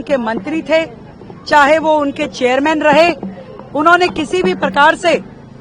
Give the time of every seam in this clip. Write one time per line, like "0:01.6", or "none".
none